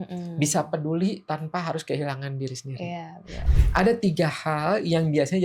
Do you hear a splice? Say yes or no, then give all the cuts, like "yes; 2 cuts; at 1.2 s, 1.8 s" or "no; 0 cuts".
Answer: yes; 1 cut; at 3.4 s